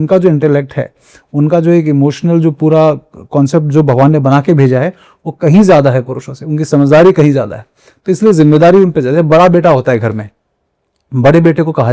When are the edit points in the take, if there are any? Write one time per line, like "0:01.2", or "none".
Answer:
none

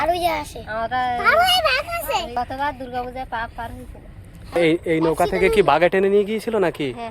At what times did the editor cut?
0:02.4
0:04.6

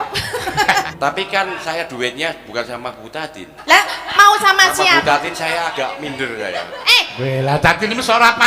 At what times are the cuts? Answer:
0:00.9

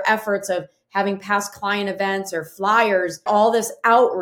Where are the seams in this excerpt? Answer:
0:03.3

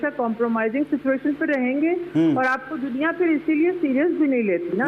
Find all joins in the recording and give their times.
none

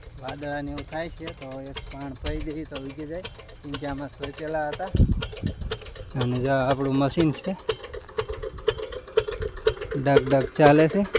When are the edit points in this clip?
none

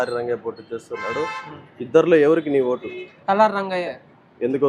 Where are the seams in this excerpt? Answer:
none

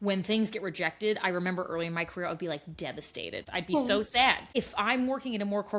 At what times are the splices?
0:03.5
0:04.4

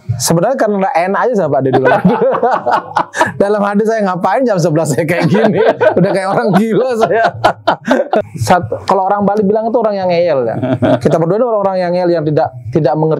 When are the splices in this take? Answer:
0:08.3

